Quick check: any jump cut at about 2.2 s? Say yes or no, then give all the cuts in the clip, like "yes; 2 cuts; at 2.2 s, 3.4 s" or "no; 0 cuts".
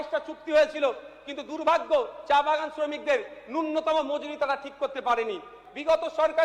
no; 1 cut; at 5.5 s